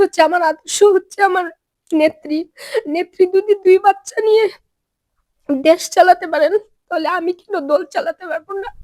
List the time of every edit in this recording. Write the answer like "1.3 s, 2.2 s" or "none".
none